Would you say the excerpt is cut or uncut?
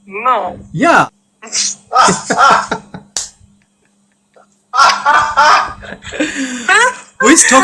cut